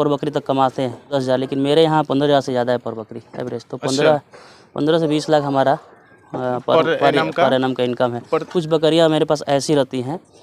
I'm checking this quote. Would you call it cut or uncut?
cut